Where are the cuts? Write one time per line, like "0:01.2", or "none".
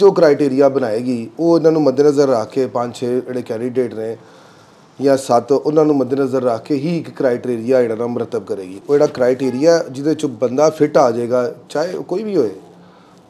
none